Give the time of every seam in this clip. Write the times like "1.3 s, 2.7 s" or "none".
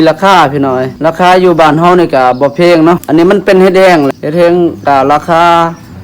0.9 s, 3.0 s, 4.1 s